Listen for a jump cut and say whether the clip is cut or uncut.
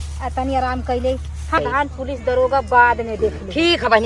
cut